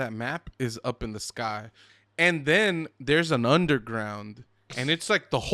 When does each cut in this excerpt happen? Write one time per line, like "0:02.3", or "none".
0:01.9